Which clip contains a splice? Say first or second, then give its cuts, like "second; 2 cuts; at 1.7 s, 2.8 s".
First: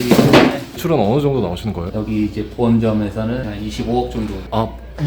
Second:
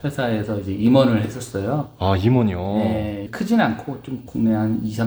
first; 3 cuts; at 0.8 s, 1.8 s, 3.5 s